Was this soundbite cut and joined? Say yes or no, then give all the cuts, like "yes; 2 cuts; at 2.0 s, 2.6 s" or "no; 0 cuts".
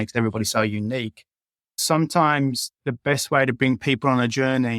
yes; 1 cut; at 1.8 s